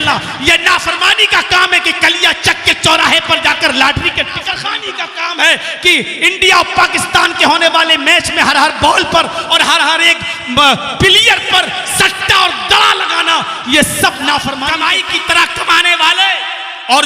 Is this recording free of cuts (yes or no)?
no